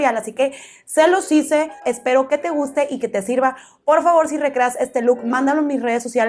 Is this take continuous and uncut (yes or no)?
no